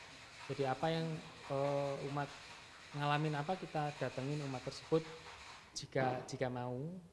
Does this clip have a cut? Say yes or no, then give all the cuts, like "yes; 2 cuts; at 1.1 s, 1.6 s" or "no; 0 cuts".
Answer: no; 0 cuts